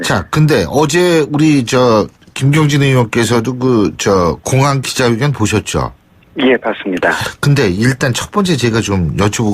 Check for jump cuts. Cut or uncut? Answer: cut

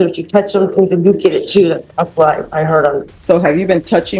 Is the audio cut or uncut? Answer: cut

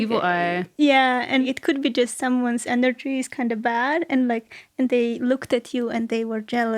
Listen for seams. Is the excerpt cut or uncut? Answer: cut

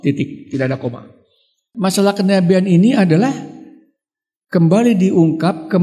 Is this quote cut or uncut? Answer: cut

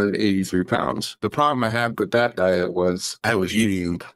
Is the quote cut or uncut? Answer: cut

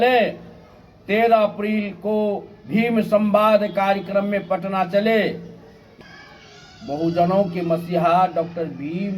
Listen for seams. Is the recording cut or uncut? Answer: cut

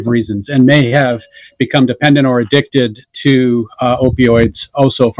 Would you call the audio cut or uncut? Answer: uncut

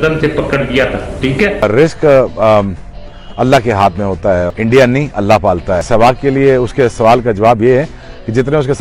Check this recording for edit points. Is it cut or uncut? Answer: cut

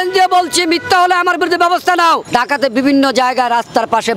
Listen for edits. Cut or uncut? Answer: cut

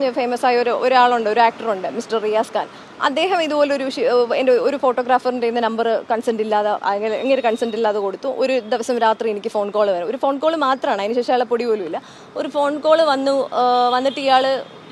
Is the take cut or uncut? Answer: uncut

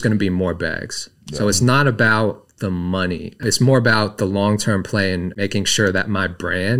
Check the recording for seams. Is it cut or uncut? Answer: cut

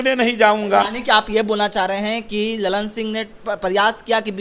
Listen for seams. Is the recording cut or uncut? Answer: uncut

